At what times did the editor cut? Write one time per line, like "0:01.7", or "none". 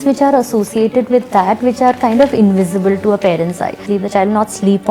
0:03.8

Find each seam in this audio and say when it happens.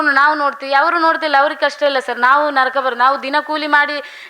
none

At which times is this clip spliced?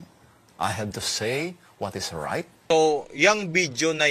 0:02.7

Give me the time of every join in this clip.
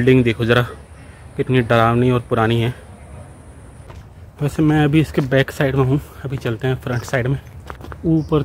none

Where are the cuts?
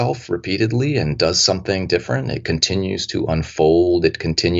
none

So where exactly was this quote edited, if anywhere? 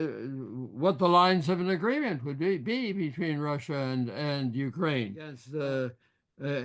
0:05.4

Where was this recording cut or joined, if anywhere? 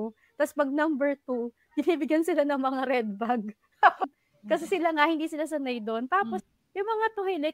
0:04.0
0:06.4

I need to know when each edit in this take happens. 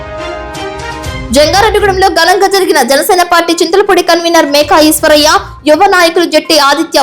0:00.9

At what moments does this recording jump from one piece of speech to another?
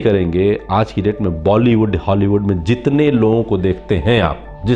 none

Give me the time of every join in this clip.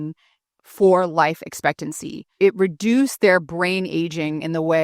0:02.3

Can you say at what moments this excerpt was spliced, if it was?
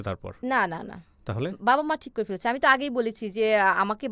none

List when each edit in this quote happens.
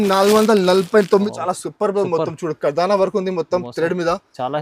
0:01.3

